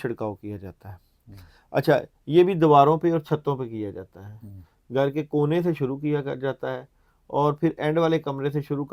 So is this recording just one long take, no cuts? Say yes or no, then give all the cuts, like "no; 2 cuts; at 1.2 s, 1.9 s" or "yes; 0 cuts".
yes; 0 cuts